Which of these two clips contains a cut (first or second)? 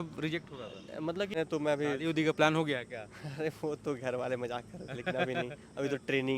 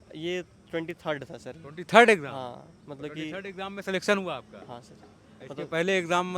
first